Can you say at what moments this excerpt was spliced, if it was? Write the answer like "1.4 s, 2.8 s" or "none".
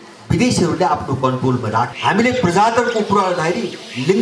1.9 s